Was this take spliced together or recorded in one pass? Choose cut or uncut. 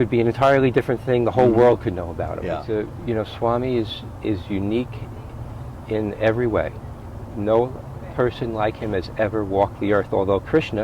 cut